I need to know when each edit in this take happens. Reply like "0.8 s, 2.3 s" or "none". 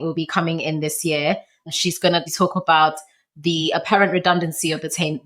1.9 s